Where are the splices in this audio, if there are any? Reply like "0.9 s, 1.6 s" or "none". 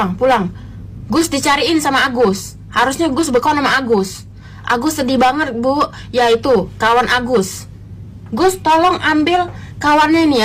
none